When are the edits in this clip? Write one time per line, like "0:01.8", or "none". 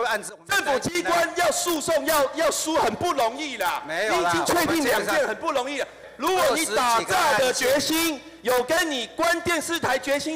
0:06.0